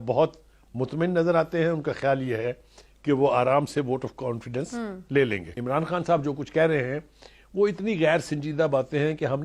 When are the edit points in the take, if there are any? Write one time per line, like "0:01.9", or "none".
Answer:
0:05.6